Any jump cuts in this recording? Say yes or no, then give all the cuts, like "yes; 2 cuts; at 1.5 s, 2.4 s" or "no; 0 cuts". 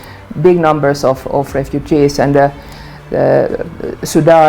no; 0 cuts